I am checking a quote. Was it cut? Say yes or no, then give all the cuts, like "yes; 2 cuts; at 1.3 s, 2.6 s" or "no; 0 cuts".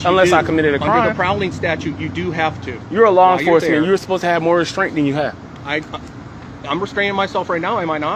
yes; 1 cut; at 2.7 s